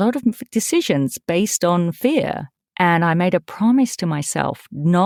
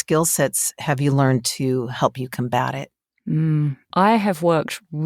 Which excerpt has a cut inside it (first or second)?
second